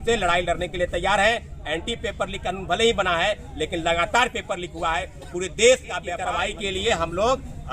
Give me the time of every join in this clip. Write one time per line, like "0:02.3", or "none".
0:06.2